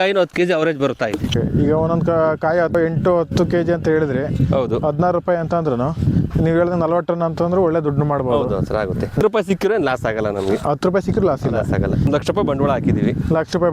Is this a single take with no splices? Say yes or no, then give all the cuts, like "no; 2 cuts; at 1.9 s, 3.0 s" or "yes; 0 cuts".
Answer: no; 4 cuts; at 1.3 s, 2.7 s, 9.2 s, 12.1 s